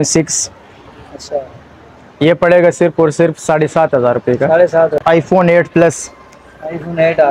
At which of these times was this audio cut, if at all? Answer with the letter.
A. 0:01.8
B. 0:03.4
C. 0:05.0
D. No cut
C